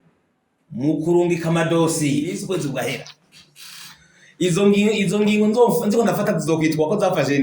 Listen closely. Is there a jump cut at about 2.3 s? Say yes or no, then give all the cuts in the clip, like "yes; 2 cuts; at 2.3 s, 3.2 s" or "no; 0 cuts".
yes; 1 cut; at 2.3 s